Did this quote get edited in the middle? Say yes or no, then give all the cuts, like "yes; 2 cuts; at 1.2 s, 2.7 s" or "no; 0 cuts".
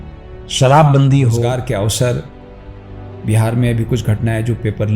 yes; 1 cut; at 1.5 s